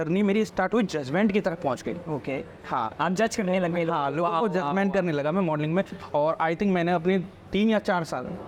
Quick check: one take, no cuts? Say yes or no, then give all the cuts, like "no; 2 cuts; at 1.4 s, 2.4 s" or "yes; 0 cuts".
yes; 0 cuts